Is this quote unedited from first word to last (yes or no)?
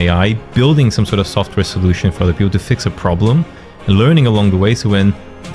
yes